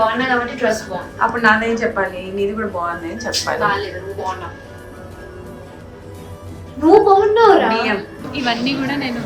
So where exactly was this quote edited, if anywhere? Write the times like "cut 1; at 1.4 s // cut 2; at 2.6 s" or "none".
cut 1; at 8.2 s